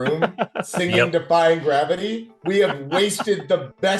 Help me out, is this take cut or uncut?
uncut